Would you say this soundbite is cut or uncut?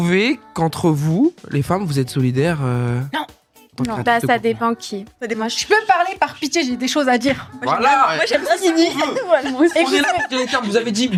uncut